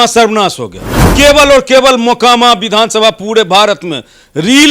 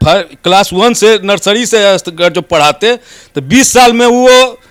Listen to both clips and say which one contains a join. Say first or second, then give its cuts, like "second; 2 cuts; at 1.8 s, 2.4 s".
first; 1 cut; at 1.1 s